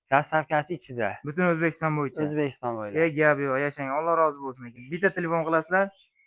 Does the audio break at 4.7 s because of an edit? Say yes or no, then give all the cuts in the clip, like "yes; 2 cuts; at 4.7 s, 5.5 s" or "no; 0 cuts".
yes; 1 cut; at 4.7 s